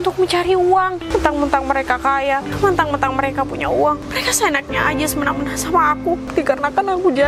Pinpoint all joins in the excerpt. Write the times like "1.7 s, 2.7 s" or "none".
1.0 s, 2.5 s, 4.0 s, 6.3 s